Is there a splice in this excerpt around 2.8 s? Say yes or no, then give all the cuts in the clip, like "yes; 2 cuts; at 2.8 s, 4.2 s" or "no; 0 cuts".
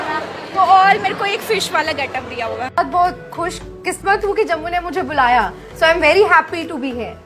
yes; 1 cut; at 2.8 s